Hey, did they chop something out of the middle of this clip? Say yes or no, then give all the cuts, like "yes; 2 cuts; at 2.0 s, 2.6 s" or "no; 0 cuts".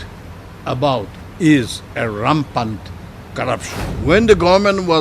yes; 2 cuts; at 1.2 s, 3.8 s